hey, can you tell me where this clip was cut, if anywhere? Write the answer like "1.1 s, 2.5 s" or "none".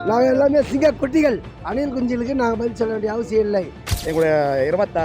1.5 s, 3.9 s